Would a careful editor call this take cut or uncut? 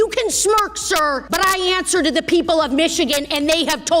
cut